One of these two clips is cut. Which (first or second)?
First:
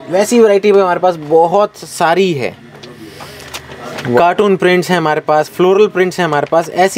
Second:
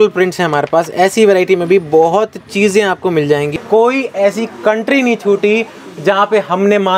second